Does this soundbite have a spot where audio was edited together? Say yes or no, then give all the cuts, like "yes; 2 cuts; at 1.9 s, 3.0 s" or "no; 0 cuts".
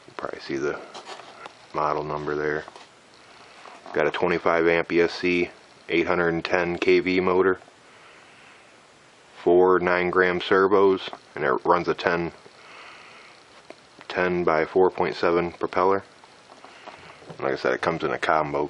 no; 0 cuts